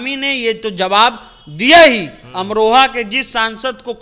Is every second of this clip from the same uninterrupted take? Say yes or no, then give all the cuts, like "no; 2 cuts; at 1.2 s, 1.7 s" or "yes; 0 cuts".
yes; 0 cuts